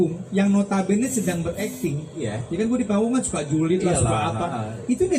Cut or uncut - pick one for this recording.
uncut